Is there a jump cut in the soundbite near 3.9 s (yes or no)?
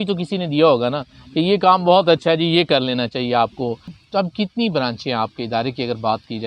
yes